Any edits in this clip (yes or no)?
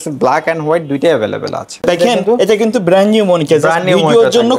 yes